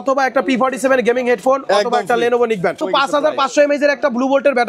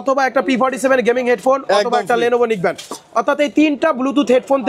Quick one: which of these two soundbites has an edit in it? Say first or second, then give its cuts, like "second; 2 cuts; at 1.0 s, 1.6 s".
first; 1 cut; at 2.8 s